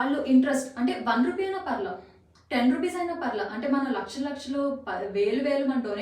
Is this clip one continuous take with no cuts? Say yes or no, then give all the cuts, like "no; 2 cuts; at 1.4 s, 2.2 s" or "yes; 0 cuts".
yes; 0 cuts